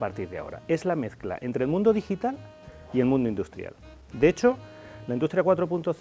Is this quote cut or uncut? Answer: uncut